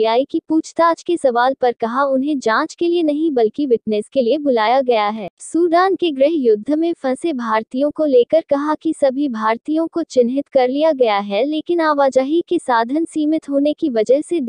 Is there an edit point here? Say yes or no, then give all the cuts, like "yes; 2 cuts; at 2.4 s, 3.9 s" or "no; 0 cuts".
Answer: yes; 1 cut; at 5.3 s